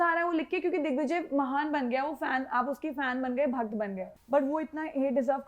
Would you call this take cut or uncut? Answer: cut